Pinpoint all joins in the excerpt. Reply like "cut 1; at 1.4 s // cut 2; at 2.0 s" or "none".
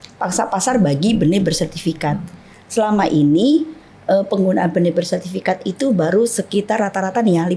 none

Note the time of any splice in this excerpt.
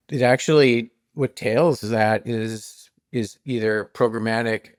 none

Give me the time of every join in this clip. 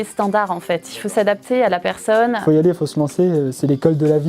cut 1; at 2.4 s

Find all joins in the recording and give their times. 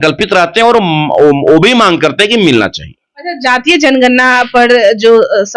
none

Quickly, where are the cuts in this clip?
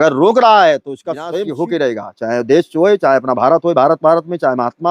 cut 1; at 1.5 s

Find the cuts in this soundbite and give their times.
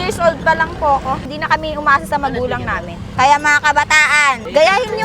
cut 1; at 1.3 s

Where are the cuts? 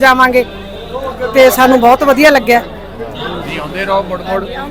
none

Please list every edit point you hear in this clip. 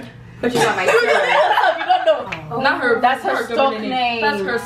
cut 1; at 2.3 s

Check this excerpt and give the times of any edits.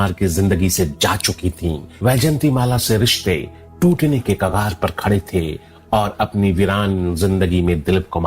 cut 1; at 5.7 s

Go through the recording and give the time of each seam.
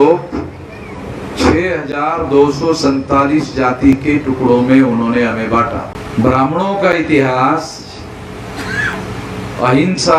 cut 1; at 6.0 s

